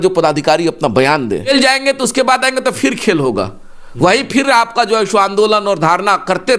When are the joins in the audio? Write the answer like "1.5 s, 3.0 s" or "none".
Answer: 1.5 s